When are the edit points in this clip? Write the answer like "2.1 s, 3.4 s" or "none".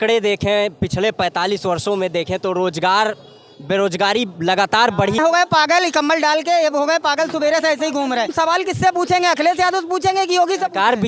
5.2 s, 8.3 s